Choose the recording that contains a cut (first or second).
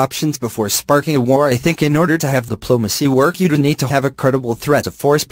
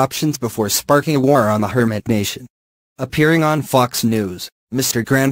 second